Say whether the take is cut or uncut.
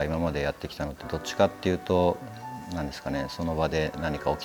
uncut